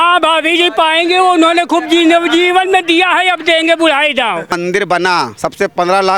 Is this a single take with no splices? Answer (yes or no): no